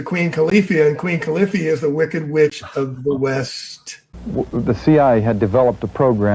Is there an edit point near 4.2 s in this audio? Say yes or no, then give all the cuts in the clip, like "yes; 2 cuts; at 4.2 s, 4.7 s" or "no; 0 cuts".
yes; 1 cut; at 4.2 s